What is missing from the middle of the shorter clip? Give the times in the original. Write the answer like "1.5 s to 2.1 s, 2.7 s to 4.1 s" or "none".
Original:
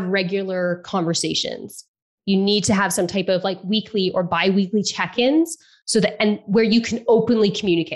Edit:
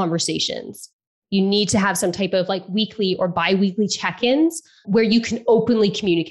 5.8 s to 6.4 s